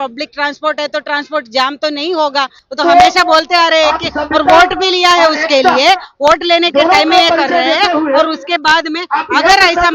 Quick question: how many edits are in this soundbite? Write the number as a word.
one